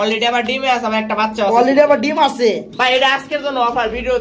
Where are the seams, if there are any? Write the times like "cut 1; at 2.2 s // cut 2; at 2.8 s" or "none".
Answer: cut 1; at 2.7 s